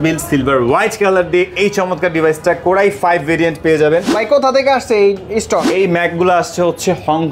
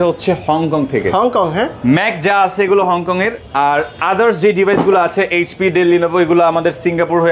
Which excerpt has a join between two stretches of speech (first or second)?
first